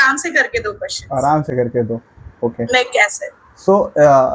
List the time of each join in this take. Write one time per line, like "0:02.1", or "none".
none